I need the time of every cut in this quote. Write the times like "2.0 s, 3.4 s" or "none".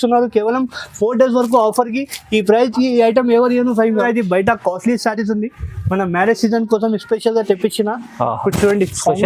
4.0 s